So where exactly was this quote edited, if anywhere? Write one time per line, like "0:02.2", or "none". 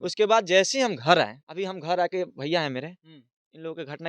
0:01.4